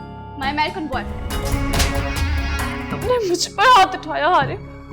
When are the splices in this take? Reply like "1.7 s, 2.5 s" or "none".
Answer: 1.3 s, 2.9 s